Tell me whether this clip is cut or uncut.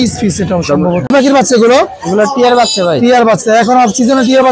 cut